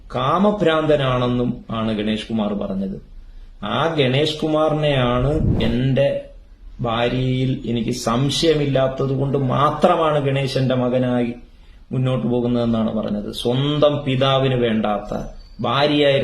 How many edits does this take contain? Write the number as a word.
one